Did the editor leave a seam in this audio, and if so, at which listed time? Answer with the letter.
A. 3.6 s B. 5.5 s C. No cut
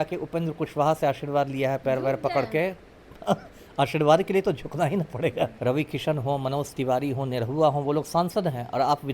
B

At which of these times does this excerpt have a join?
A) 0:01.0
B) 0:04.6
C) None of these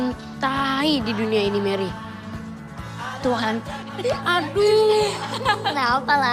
C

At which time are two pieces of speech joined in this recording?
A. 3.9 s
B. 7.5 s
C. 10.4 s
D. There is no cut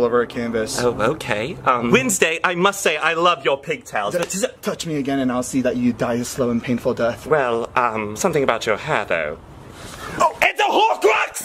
D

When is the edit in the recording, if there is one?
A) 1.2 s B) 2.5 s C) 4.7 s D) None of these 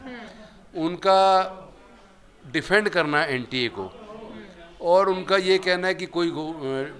D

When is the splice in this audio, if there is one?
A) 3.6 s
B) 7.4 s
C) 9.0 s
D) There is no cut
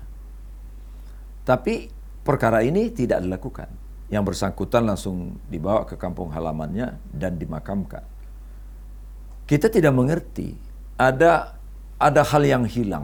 D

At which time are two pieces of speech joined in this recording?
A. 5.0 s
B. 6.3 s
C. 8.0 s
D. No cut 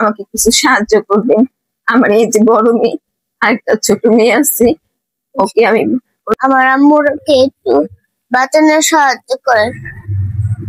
B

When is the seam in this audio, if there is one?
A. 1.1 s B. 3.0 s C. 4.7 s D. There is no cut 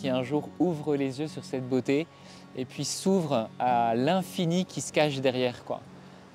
D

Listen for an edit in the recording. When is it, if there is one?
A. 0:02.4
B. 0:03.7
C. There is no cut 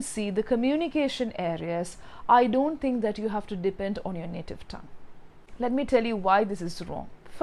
C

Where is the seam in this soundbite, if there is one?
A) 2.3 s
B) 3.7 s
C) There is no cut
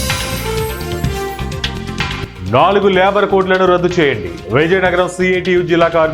A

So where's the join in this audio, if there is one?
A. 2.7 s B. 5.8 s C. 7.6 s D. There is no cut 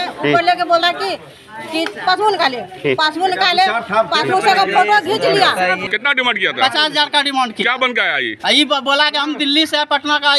B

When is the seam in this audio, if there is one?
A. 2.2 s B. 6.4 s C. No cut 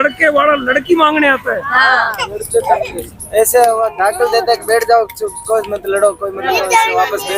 A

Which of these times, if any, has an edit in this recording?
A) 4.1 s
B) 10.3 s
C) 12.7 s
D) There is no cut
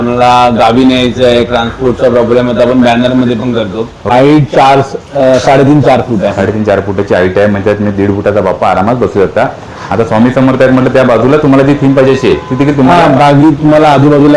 A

